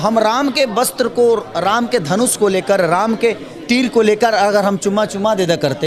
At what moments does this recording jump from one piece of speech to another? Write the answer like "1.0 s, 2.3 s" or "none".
none